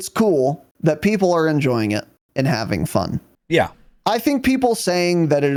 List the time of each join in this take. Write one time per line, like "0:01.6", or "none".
none